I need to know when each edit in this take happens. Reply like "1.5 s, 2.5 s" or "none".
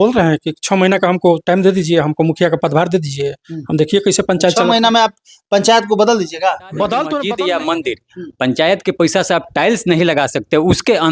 7.2 s